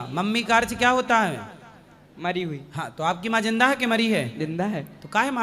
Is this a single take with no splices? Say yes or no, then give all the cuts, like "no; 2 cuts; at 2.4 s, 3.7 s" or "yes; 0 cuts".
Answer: yes; 0 cuts